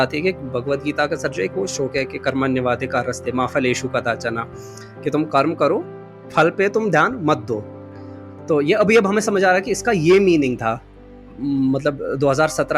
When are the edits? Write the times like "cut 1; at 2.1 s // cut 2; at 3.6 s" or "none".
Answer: cut 1; at 11.3 s